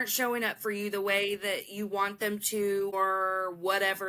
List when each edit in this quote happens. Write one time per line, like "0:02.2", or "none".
0:03.0

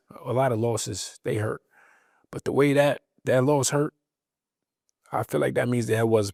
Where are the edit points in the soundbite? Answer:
none

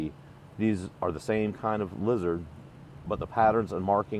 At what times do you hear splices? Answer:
none

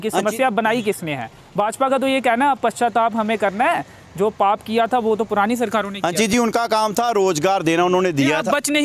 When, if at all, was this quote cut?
none

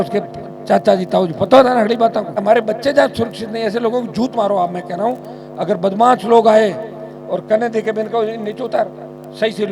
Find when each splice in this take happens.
0:02.4

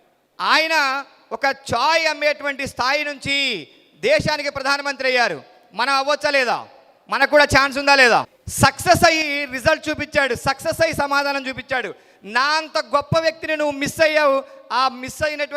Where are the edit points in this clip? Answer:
0:08.4

